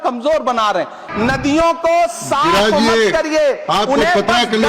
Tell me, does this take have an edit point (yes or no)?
yes